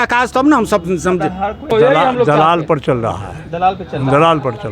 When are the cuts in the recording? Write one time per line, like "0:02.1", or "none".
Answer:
0:01.7